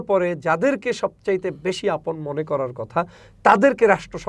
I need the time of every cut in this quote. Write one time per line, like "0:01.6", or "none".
none